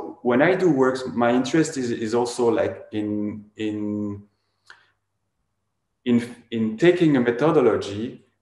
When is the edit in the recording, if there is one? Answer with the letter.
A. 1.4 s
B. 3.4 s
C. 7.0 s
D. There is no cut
D